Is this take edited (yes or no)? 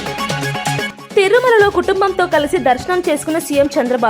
yes